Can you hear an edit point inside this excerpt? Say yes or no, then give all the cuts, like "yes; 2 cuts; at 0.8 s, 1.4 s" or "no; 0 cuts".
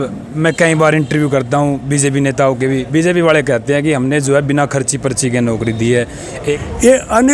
yes; 1 cut; at 6.3 s